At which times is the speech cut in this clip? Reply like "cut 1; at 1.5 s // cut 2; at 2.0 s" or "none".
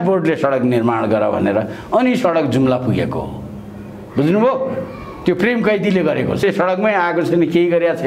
cut 1; at 6.4 s